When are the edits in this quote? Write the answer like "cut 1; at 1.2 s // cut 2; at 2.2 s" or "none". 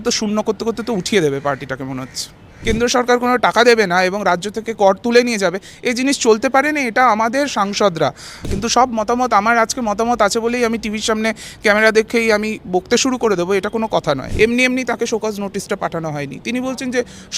cut 1; at 2.5 s // cut 2; at 8.6 s // cut 3; at 14.3 s

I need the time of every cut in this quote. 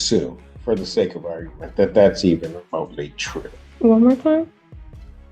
cut 1; at 3.6 s

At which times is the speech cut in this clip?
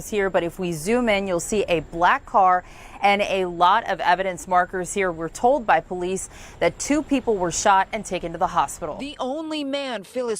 cut 1; at 9.0 s

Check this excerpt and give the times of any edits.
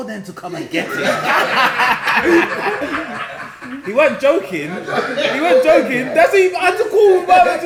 none

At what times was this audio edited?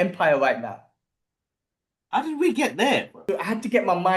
cut 1; at 3.2 s

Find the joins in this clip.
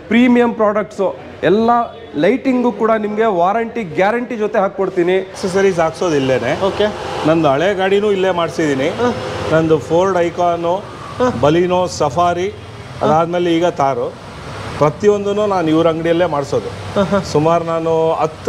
cut 1; at 5.4 s

